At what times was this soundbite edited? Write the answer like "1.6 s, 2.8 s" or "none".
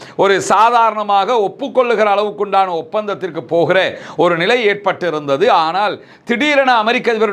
none